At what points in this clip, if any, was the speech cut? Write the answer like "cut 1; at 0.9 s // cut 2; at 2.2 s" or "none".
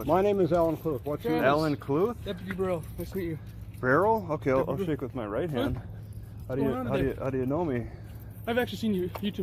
none